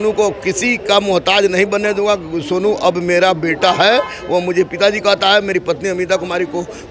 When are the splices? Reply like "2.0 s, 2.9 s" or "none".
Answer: none